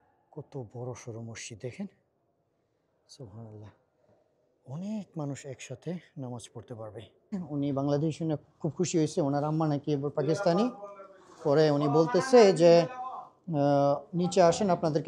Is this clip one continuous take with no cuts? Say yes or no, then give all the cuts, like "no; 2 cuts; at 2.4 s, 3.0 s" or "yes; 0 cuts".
no; 1 cut; at 7.4 s